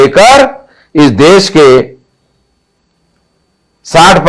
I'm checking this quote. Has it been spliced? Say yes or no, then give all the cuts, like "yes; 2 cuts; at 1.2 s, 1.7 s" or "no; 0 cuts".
no; 0 cuts